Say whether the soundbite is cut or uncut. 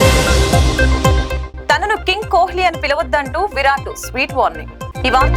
uncut